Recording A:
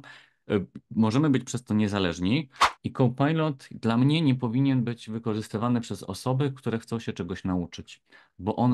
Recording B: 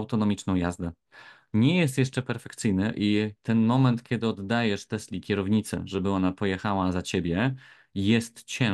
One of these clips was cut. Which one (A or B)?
A